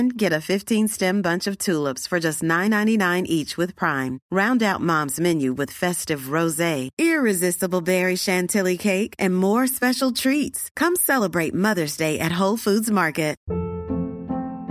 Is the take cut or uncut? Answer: cut